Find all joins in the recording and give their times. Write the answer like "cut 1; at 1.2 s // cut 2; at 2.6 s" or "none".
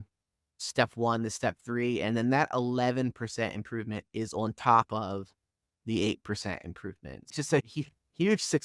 cut 1; at 7.3 s